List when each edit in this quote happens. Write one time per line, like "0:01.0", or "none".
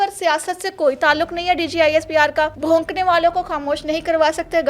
0:02.6